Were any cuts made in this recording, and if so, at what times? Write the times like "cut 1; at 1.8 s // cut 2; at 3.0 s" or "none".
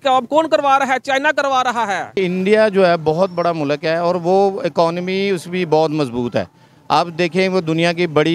cut 1; at 2.2 s